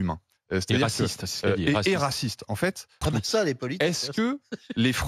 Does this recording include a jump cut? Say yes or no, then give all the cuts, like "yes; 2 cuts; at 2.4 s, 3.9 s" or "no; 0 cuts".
yes; 1 cut; at 3.0 s